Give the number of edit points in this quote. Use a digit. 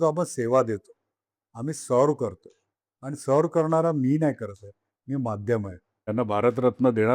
1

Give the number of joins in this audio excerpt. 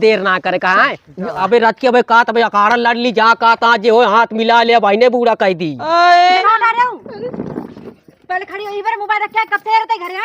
2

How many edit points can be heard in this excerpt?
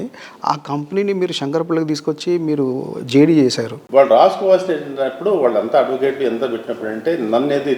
1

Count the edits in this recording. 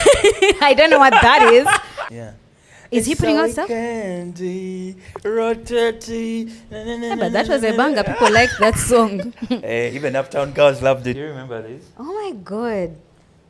2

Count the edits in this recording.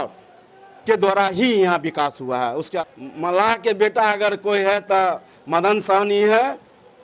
1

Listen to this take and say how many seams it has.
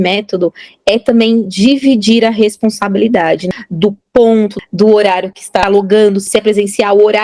4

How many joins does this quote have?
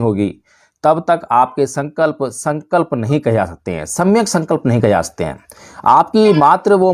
0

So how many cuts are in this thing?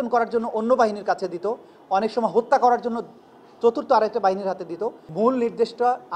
1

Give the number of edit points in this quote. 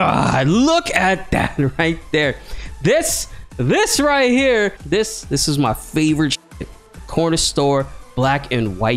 1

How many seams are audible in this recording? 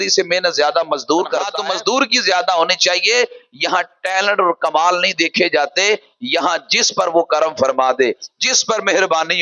0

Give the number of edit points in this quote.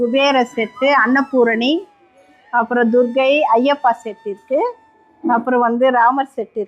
0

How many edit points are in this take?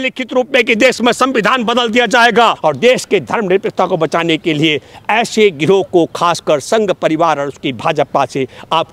1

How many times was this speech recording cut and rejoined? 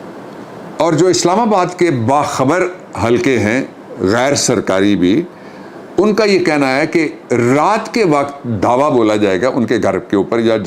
0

